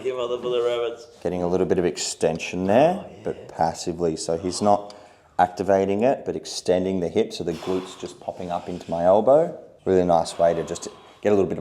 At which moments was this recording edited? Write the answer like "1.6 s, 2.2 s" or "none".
9.7 s